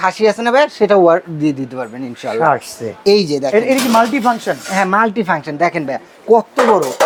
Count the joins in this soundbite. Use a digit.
0